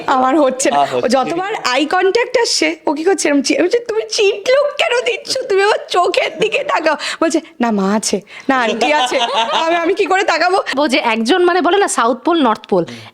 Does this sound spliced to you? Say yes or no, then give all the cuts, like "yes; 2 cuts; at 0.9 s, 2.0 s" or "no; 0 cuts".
yes; 1 cut; at 10.7 s